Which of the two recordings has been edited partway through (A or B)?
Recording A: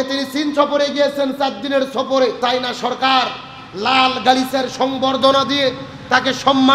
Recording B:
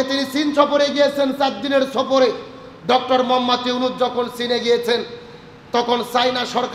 A